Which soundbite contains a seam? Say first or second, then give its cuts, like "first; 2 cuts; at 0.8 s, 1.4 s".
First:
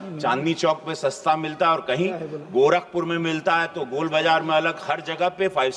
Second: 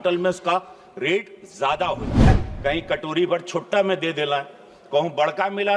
second; 1 cut; at 2.3 s